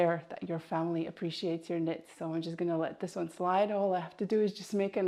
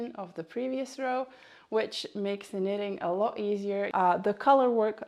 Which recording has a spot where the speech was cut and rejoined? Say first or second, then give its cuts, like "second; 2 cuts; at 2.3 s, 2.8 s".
second; 1 cut; at 3.9 s